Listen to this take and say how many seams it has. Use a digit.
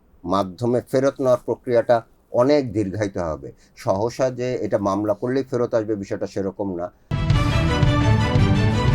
1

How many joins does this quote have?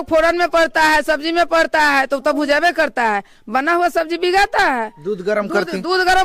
0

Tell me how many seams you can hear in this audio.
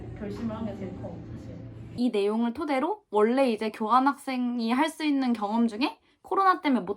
1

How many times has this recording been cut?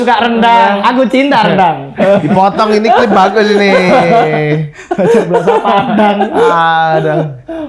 0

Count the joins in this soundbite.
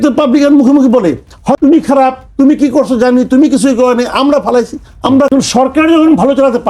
2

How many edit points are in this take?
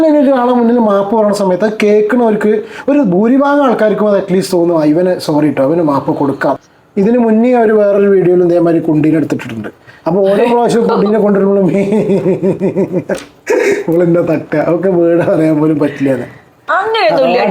1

